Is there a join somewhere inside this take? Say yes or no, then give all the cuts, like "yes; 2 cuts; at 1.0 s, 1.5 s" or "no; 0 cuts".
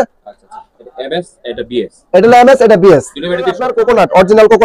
yes; 1 cut; at 3.7 s